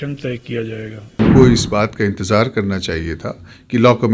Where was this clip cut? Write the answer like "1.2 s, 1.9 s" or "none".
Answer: 1.2 s